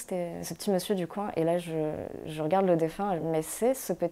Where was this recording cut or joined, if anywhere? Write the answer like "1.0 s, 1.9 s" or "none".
3.2 s